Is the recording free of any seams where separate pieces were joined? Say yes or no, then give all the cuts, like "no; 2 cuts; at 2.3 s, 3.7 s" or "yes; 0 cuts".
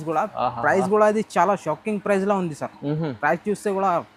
yes; 0 cuts